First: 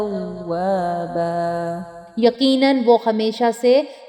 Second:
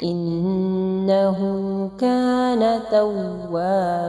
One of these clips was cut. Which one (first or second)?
first